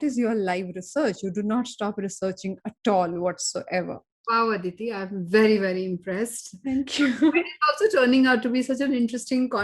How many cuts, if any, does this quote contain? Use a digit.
1